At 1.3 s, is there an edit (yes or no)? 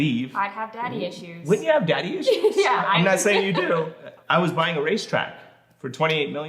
no